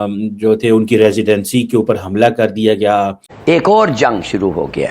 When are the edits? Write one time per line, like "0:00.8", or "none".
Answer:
0:03.2